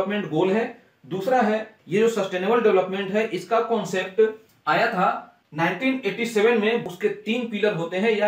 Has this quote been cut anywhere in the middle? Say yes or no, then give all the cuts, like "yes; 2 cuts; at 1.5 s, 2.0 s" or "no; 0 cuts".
yes; 2 cuts; at 1.8 s, 6.8 s